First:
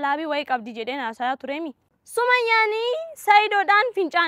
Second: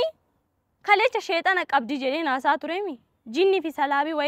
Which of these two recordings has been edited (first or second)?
first